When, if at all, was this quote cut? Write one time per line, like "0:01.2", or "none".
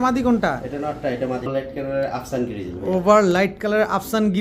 0:01.5